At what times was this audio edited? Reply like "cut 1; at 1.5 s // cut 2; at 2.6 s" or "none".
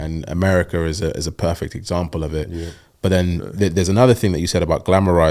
none